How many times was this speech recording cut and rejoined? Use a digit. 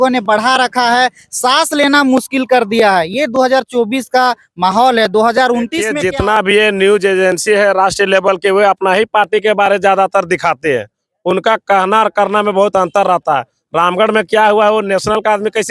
1